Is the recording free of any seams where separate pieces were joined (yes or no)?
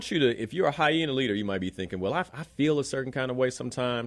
yes